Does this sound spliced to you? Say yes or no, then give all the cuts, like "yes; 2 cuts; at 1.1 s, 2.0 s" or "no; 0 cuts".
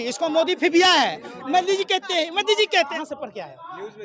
yes; 1 cut; at 2.9 s